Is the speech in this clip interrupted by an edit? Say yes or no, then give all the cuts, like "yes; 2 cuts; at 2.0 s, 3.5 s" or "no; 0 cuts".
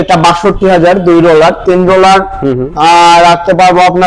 no; 0 cuts